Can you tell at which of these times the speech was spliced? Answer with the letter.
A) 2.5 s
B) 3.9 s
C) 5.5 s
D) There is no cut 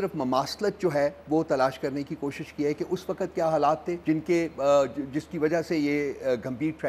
B